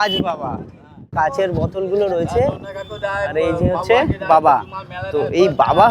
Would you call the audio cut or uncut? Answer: cut